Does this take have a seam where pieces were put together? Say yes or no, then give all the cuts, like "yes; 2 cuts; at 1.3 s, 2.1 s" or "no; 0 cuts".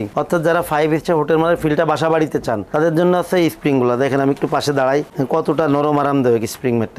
no; 0 cuts